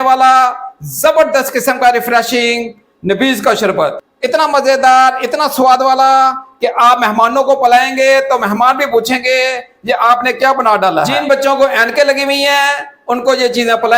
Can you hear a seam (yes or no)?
yes